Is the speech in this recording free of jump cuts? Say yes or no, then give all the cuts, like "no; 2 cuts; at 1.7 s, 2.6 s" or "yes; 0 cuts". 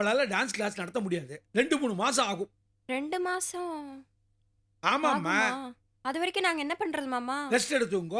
yes; 0 cuts